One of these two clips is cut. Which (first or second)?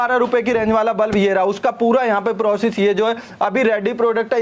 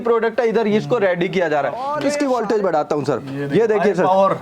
second